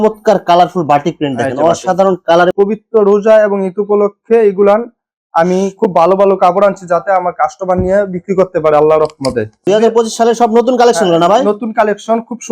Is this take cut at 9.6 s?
yes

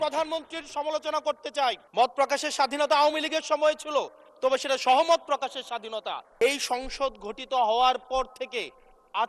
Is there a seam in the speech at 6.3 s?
yes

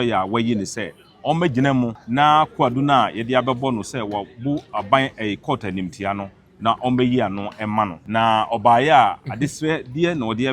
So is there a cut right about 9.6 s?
no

